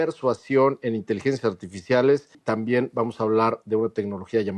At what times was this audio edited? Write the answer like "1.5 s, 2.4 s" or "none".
2.4 s

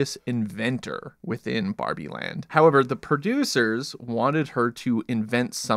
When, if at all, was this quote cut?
1.1 s, 2.5 s

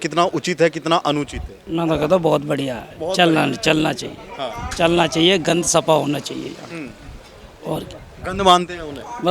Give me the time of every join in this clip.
none

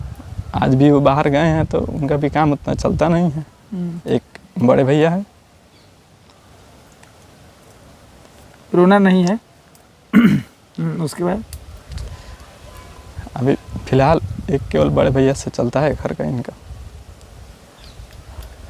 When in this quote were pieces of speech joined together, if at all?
none

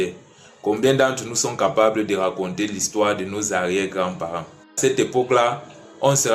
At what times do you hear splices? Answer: 4.8 s

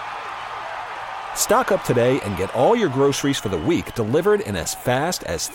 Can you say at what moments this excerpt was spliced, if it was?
none

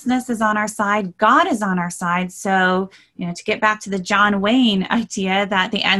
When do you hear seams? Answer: none

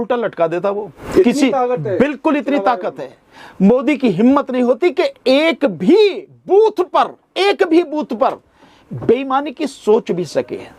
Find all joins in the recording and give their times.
0.9 s

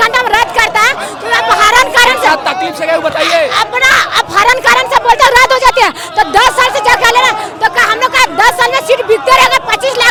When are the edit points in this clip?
none

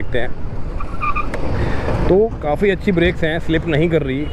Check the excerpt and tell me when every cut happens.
none

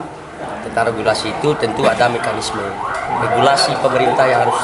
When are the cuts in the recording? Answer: none

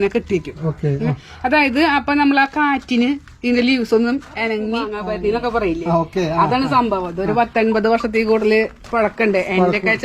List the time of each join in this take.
4.9 s

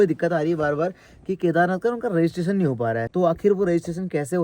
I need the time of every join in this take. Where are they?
3.1 s

